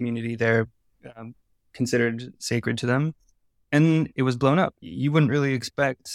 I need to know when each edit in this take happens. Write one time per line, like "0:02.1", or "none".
0:04.8